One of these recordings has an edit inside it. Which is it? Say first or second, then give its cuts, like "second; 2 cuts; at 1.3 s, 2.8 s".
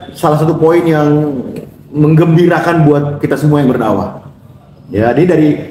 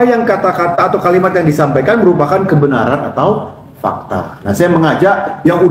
second; 1 cut; at 4.3 s